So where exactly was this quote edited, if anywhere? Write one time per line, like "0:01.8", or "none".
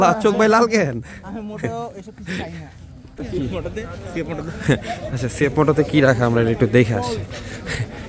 0:03.2